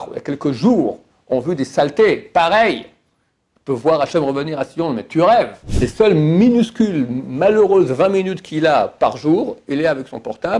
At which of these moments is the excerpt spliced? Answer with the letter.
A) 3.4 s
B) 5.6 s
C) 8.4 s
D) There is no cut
B